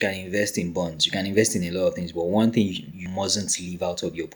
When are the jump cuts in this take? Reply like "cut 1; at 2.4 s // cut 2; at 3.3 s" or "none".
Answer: cut 1; at 3.1 s